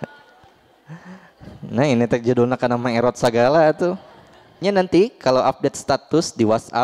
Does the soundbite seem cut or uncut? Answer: cut